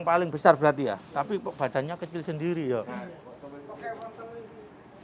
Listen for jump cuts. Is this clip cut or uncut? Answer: uncut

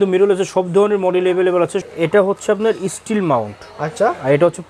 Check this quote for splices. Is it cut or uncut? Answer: cut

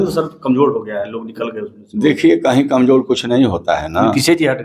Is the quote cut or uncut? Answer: uncut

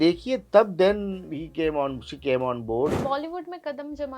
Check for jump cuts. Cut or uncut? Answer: cut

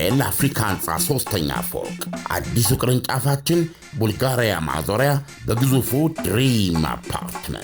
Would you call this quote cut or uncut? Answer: uncut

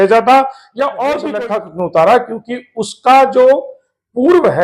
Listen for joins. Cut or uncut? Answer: cut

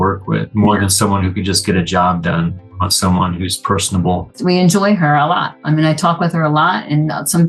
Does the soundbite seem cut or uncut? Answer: cut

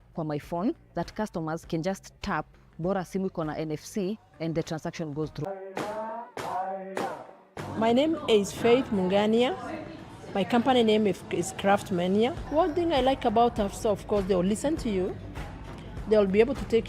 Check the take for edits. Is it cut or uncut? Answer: cut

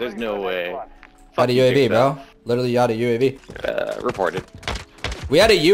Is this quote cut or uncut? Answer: cut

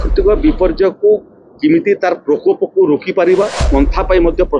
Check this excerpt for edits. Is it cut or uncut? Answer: cut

